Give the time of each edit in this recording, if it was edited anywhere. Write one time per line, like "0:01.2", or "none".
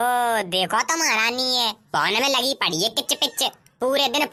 none